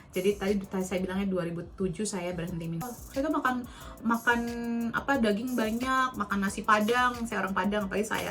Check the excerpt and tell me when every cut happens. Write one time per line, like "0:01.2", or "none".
0:02.8